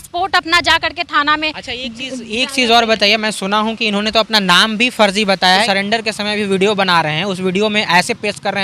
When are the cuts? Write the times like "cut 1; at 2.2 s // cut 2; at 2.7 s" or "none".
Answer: cut 1; at 5.6 s